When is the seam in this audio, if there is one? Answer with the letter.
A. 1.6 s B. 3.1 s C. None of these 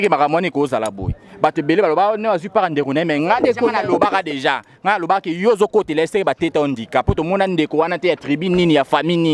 C